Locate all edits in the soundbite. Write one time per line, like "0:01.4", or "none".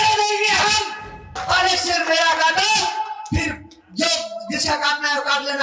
0:01.3